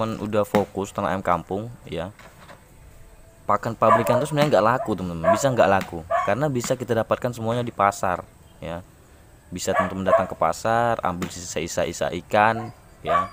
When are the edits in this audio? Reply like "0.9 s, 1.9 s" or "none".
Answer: none